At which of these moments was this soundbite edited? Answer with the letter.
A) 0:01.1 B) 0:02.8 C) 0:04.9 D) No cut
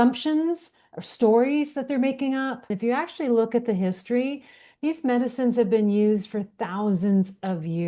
B